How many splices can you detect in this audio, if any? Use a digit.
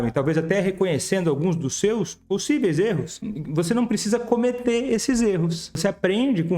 2